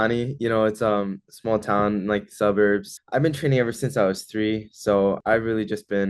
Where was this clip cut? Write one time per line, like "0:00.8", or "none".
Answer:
0:03.0
0:05.2